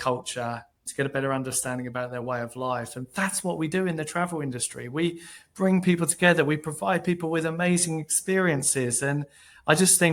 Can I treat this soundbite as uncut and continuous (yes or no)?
yes